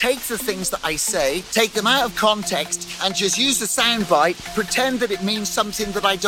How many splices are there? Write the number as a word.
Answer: two